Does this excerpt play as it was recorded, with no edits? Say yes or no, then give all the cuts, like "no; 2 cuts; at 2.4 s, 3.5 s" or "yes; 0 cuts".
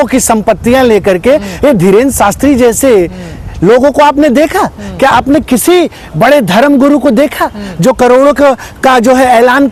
yes; 0 cuts